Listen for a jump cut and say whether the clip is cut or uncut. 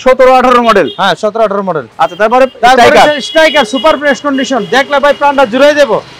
uncut